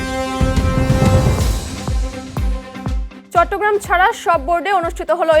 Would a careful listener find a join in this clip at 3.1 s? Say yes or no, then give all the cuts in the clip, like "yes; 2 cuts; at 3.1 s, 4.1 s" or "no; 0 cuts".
yes; 1 cut; at 3.1 s